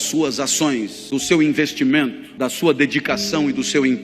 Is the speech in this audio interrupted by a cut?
yes; 2 cuts; at 1.0 s, 2.2 s

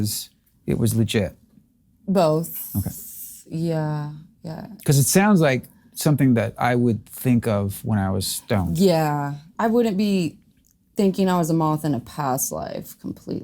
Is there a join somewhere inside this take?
yes; 1 cut; at 9.5 s

